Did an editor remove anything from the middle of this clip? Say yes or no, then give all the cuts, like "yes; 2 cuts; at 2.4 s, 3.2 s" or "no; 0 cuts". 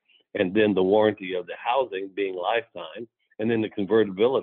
no; 0 cuts